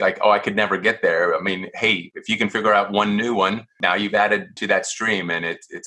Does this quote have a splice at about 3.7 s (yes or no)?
yes